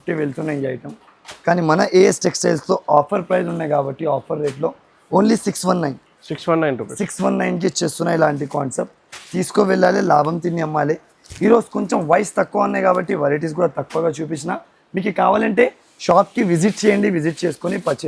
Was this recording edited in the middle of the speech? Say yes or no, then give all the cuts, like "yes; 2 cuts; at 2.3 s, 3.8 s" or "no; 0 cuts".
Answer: no; 0 cuts